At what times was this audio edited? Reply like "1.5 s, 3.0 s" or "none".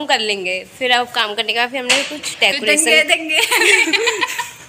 none

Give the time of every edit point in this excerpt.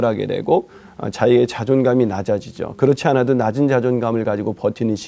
none

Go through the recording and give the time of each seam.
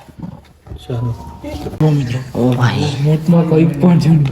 1.8 s

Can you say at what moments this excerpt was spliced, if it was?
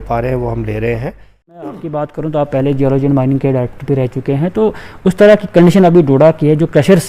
1.7 s

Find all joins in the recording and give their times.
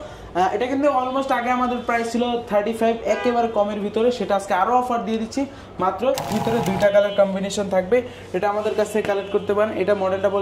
6.3 s

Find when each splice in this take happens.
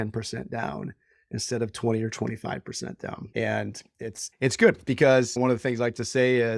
3.2 s, 4.2 s, 5.3 s

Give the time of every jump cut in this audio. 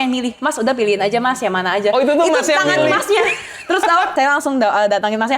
4.1 s

